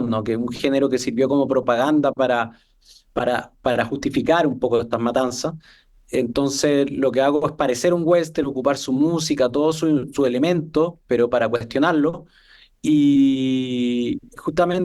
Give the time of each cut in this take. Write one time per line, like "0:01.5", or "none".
none